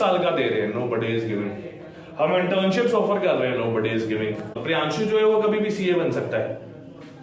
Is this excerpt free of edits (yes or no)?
no